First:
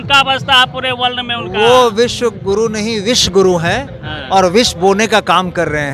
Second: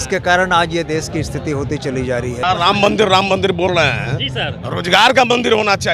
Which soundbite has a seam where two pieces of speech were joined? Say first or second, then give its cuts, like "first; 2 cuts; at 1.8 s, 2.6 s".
second; 1 cut; at 2.4 s